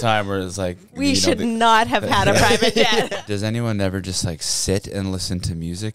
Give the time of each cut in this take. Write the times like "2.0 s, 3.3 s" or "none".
3.1 s